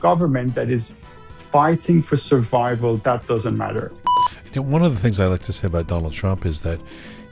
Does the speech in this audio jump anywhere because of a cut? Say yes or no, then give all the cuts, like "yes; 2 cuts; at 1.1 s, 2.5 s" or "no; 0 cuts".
yes; 1 cut; at 4.2 s